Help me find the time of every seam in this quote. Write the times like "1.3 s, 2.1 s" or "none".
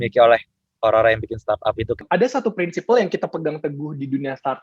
2.0 s